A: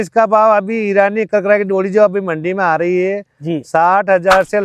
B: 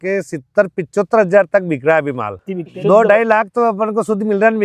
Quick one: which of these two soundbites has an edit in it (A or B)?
B